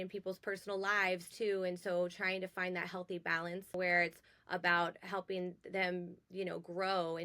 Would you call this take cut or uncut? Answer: cut